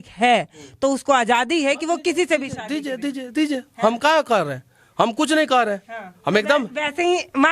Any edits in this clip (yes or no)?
no